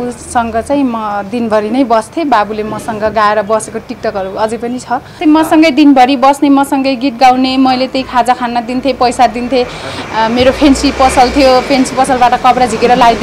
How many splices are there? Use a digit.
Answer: 1